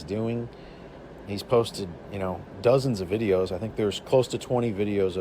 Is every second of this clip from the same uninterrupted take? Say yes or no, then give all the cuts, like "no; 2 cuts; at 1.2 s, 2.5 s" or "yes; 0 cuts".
no; 1 cut; at 2.5 s